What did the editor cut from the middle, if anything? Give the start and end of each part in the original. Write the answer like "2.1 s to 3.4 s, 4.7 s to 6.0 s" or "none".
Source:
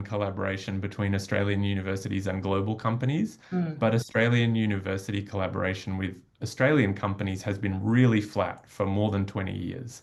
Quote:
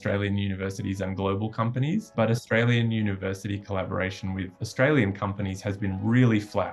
3.3 s to 3.7 s, 6.2 s to 6.4 s